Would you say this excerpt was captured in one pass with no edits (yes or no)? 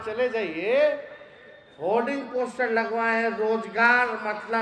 yes